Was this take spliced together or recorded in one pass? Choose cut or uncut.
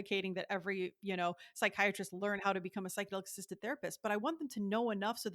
uncut